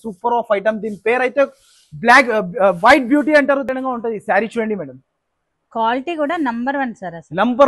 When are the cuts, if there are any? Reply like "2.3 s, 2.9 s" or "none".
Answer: 3.7 s